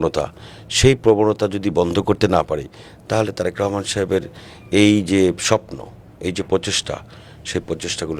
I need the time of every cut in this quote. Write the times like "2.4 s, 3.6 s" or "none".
none